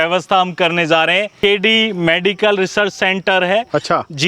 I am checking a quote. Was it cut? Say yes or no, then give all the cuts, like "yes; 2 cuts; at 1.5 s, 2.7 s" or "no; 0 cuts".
yes; 1 cut; at 1.4 s